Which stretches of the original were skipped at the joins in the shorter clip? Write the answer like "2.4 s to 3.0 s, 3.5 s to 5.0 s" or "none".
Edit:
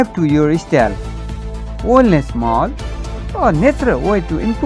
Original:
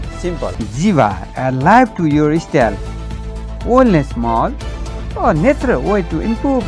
none